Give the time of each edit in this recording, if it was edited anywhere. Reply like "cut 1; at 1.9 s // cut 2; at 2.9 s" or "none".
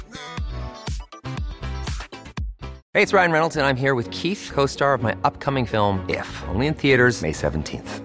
cut 1; at 2.7 s